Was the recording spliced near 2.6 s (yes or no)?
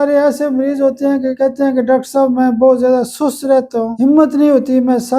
no